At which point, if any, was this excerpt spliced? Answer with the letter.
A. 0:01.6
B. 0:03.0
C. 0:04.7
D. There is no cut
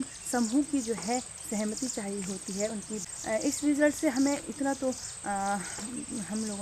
B